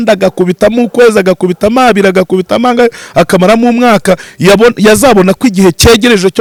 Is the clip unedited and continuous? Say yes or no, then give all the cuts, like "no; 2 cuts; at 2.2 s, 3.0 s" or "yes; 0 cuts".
yes; 0 cuts